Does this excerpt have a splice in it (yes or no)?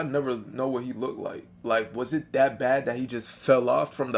no